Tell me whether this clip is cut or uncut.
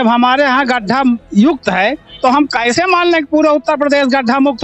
uncut